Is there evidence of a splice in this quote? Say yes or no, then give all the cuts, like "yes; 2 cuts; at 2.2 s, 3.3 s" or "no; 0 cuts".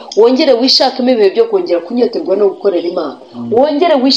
no; 0 cuts